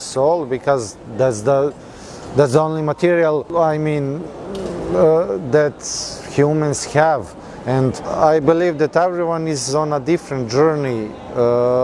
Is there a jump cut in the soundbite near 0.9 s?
no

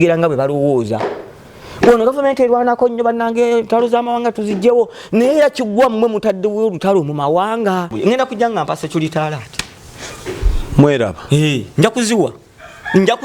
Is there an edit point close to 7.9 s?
yes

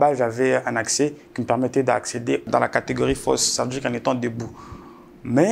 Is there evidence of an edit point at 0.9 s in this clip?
no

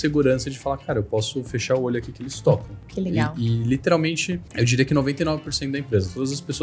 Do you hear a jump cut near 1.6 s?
no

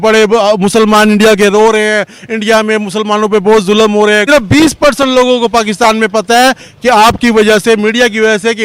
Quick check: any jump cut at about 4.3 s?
yes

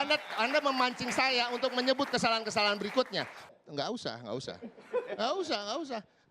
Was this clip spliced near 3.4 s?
yes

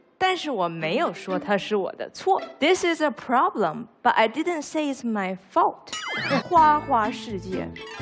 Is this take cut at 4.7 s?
no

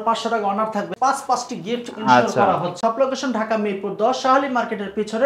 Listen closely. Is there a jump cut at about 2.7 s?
yes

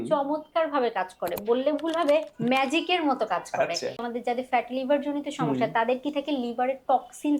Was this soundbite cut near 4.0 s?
yes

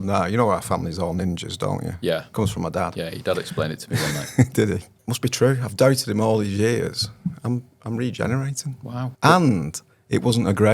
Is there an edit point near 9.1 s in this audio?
yes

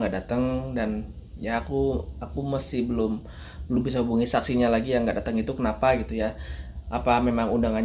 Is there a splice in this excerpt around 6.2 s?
no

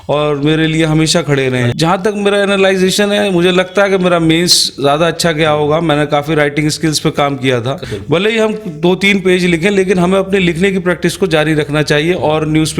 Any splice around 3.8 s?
no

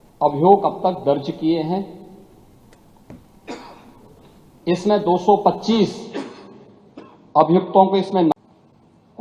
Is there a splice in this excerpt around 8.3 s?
yes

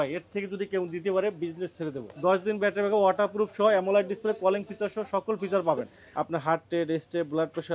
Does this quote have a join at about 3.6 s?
no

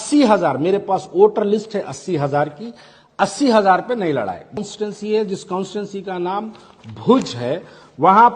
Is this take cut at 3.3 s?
no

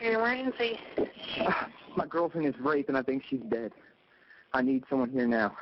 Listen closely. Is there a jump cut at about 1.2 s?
yes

